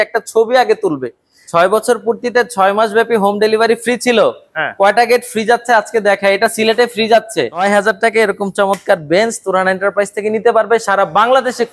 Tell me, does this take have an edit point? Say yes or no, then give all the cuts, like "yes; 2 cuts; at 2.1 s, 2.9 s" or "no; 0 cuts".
yes; 2 cuts; at 1.4 s, 7.6 s